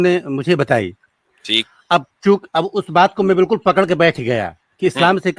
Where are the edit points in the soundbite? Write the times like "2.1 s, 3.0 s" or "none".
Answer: none